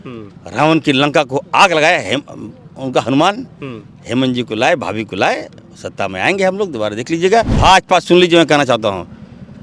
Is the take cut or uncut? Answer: cut